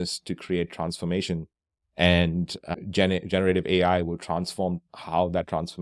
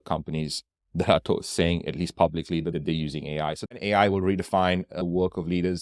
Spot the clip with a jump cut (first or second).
second